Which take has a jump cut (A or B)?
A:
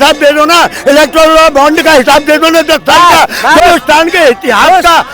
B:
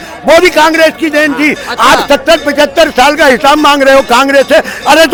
A